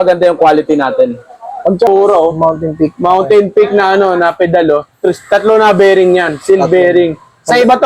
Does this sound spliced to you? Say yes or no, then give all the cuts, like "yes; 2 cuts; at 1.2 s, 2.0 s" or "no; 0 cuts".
yes; 1 cut; at 1.9 s